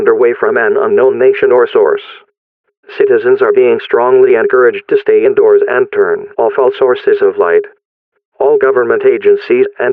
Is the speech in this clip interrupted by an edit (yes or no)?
no